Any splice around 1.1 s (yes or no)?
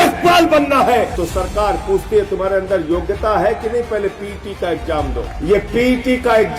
yes